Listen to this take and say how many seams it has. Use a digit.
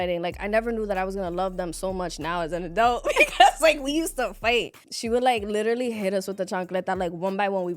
1